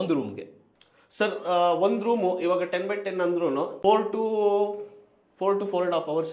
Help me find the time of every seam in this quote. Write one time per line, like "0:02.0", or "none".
0:03.7